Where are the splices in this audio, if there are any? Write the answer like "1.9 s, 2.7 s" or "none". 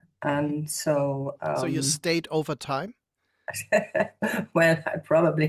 none